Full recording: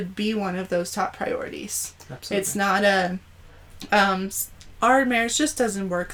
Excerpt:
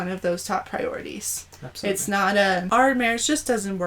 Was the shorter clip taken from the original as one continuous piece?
no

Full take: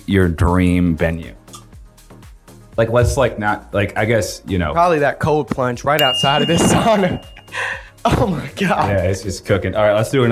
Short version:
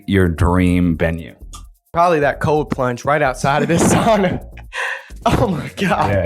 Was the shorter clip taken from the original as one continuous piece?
no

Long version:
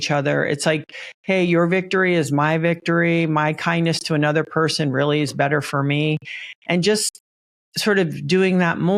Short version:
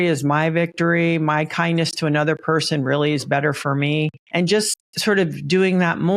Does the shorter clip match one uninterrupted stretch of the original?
no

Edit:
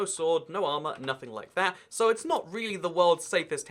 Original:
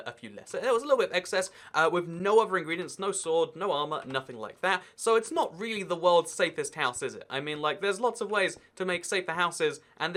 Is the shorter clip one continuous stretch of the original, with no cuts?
yes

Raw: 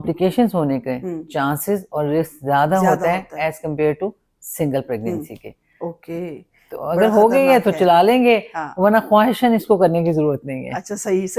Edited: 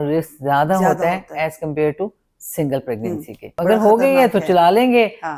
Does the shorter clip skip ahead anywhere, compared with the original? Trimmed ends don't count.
yes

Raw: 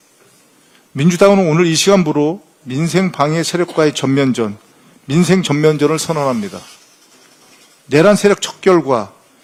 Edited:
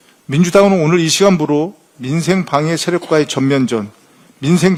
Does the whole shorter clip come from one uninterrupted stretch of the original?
yes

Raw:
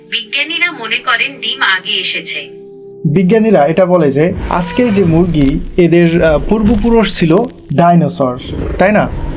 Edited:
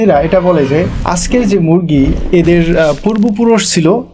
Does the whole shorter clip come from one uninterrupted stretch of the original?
yes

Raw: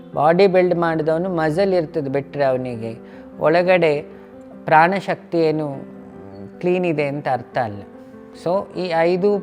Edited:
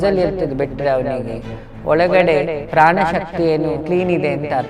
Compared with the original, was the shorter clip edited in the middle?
yes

